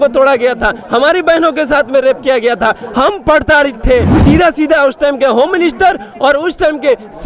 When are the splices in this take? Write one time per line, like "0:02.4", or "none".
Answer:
0:04.1

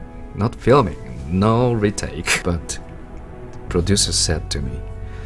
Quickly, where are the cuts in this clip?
0:02.4

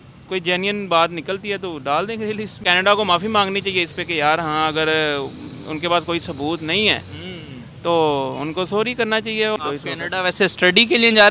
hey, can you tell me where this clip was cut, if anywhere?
0:02.5
0:09.6

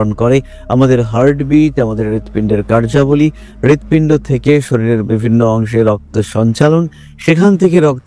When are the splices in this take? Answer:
none

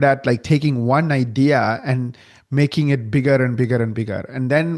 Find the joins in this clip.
none

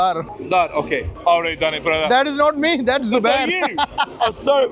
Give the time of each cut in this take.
0:01.1

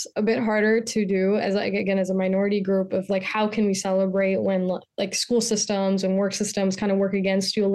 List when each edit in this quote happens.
none

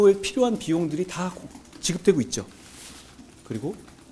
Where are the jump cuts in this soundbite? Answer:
none

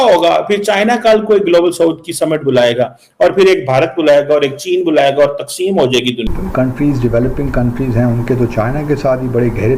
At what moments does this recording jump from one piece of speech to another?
0:06.3

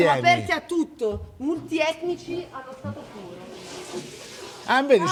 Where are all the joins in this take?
none

